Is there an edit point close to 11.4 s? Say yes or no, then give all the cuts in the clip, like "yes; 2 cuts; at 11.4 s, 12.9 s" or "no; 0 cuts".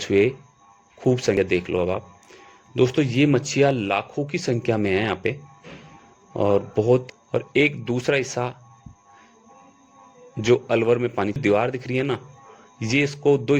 yes; 3 cuts; at 1.4 s, 7.1 s, 11.4 s